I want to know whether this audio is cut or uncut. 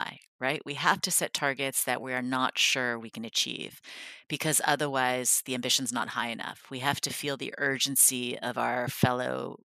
uncut